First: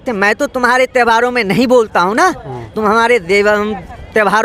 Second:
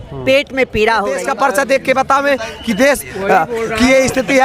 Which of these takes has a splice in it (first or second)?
second